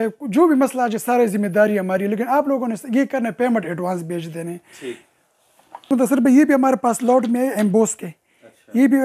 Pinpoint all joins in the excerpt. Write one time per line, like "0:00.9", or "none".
none